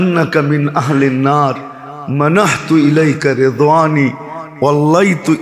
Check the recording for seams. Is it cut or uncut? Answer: uncut